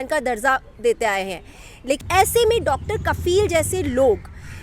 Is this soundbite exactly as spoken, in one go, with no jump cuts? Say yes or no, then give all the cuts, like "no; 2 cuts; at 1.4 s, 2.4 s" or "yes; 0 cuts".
no; 1 cut; at 2.0 s